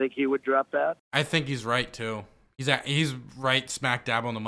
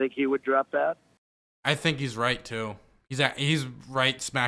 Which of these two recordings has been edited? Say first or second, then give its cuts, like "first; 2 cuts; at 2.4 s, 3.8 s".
first; 1 cut; at 1.0 s